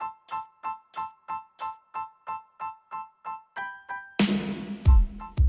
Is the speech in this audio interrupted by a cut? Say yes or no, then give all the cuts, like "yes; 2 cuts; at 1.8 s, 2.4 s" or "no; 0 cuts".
no; 0 cuts